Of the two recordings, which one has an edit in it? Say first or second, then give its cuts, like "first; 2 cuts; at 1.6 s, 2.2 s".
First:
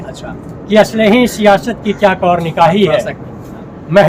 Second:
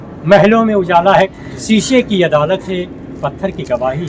second; 1 cut; at 1.4 s